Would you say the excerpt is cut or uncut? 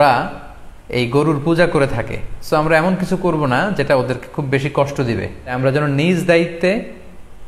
cut